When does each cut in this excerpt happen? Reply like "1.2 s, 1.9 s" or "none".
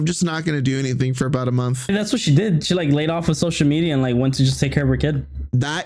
1.9 s